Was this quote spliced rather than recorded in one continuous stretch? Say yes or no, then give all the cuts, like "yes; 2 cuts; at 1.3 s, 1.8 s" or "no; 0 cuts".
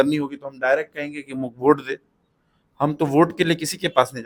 no; 0 cuts